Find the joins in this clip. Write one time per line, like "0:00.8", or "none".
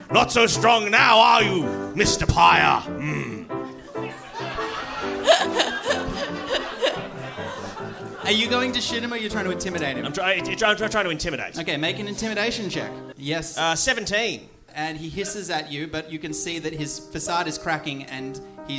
0:13.1
0:14.7